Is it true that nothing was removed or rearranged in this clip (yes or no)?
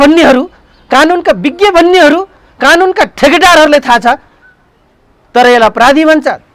yes